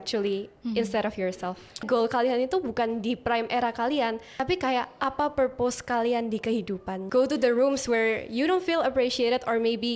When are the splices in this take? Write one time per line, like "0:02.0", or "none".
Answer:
0:01.9
0:04.3
0:06.9